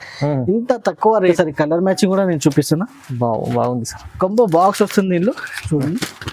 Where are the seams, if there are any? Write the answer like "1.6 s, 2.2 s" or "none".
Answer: 1.3 s